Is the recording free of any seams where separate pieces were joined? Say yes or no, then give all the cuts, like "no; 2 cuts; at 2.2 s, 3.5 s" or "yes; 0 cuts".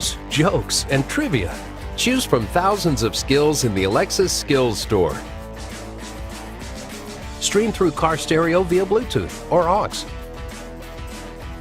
yes; 0 cuts